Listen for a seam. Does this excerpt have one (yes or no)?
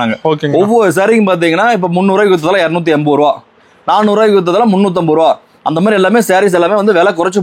no